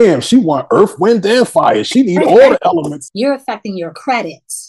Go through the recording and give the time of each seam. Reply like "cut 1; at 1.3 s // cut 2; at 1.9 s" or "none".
cut 1; at 3.0 s